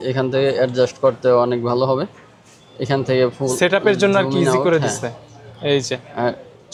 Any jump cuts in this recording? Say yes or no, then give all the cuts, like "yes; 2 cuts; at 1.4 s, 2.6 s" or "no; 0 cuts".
no; 0 cuts